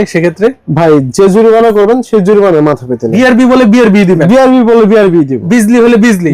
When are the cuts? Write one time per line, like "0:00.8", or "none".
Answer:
0:03.1
0:05.4